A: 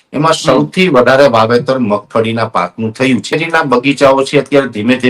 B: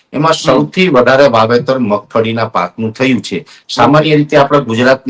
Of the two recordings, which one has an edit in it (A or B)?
A